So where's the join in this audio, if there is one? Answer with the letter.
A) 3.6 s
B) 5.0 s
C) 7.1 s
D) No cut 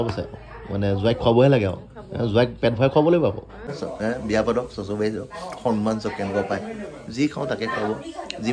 A